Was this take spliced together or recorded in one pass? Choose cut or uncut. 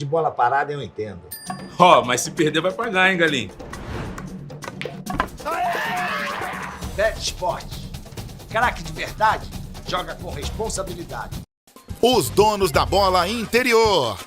cut